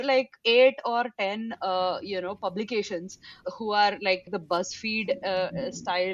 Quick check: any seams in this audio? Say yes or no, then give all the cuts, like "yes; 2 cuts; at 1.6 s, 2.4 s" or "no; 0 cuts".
yes; 2 cuts; at 3.4 s, 4.3 s